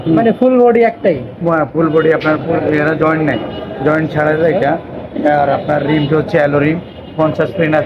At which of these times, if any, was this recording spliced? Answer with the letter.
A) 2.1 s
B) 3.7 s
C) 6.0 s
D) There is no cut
D